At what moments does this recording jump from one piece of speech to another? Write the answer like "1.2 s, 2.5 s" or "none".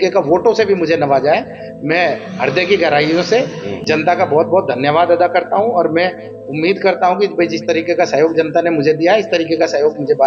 none